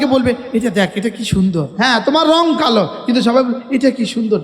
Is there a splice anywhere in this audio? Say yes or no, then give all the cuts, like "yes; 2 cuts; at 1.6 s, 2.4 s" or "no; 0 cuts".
yes; 1 cut; at 1.7 s